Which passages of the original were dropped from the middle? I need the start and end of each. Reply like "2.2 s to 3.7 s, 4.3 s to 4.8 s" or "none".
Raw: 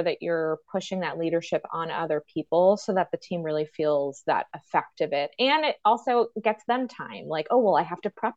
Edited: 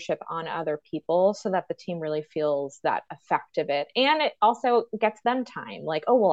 none